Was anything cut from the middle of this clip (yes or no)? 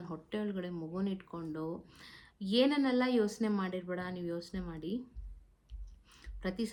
no